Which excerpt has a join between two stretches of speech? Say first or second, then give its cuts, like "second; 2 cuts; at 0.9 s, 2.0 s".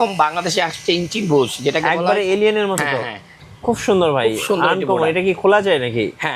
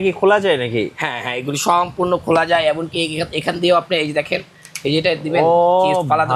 first; 1 cut; at 3.4 s